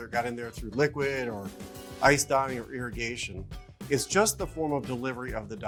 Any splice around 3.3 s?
no; 0 cuts

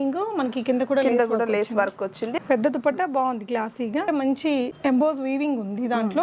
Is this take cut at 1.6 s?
no; 1 cut; at 4.1 s

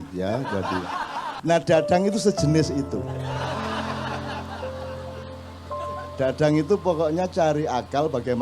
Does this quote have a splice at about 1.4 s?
yes; 1 cut; at 1.4 s

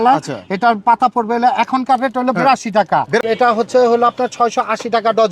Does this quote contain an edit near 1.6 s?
no; 1 cut; at 3.2 s

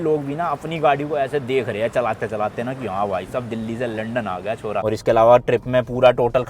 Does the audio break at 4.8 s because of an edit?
yes; 1 cut; at 4.8 s

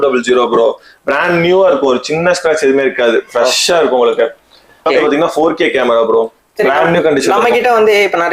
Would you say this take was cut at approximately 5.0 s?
yes; 1 cut; at 5.0 s

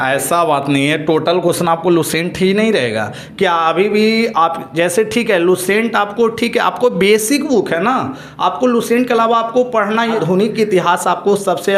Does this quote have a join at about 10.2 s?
yes; 1 cut; at 10.2 s

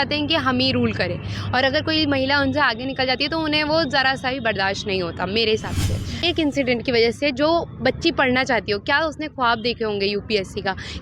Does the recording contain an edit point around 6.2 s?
yes; 1 cut; at 6.2 s

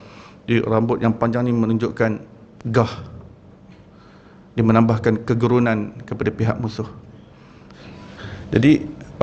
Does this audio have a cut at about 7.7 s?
yes; 1 cut; at 7.7 s

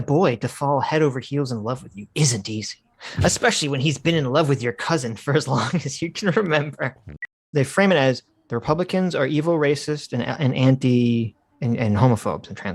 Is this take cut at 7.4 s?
yes; 1 cut; at 7.4 s

